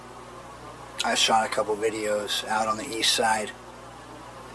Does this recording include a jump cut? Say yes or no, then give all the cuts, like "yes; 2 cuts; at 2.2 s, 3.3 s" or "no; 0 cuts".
yes; 1 cut; at 3.4 s